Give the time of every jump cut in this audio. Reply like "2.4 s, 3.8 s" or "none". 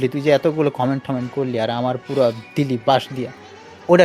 none